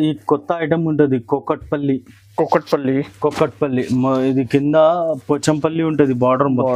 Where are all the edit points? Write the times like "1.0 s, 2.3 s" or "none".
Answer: none